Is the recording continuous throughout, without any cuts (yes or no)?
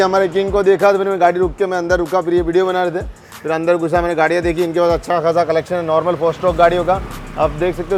yes